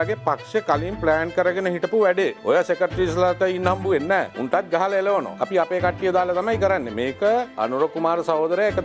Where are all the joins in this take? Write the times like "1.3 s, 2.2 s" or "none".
2.5 s, 4.4 s, 5.4 s, 7.5 s